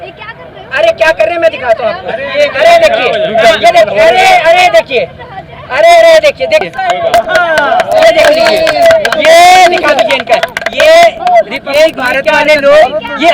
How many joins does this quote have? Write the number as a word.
one